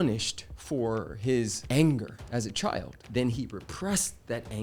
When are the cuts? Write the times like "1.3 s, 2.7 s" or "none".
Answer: 1.6 s

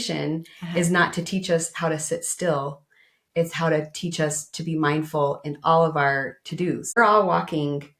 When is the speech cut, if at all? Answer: 7.0 s

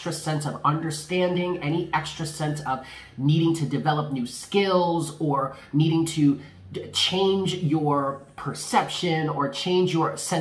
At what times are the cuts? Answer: none

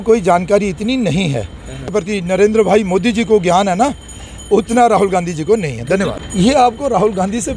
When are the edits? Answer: 1.9 s, 6.1 s

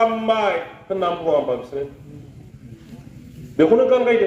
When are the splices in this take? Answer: none

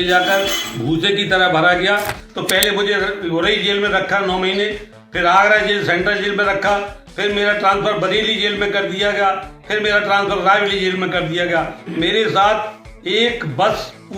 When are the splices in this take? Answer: 2.2 s

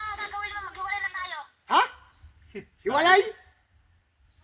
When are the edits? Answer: none

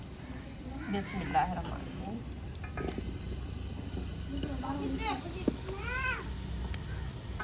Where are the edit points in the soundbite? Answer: none

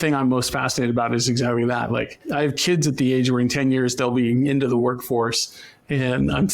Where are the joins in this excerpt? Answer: 2.2 s

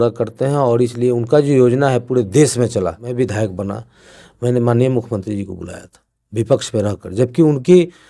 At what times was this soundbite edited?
3.0 s

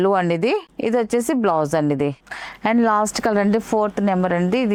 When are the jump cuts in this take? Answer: none

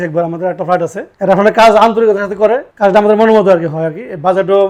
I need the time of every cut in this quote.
none

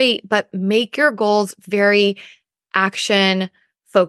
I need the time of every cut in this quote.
none

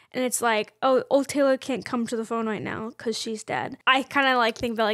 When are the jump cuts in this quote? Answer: 3.7 s

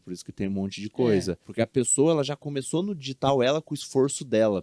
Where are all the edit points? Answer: 1.4 s

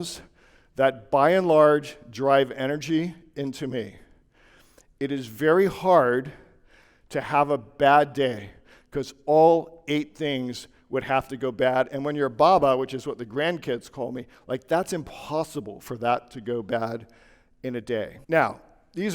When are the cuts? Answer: 18.2 s

